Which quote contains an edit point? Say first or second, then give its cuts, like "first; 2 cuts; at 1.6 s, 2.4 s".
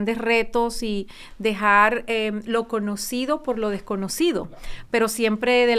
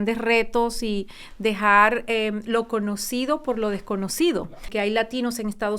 second; 1 cut; at 4.7 s